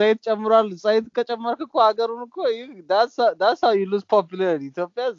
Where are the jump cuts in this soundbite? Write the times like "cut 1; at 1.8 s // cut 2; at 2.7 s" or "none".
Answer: none